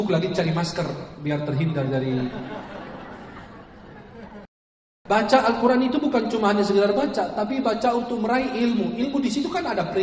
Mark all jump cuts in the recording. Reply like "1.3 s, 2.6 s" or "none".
4.9 s